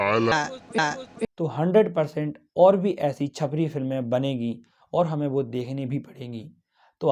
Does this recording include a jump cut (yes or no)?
no